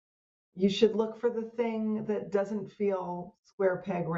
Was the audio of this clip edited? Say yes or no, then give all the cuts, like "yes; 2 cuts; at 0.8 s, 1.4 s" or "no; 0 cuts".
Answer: no; 0 cuts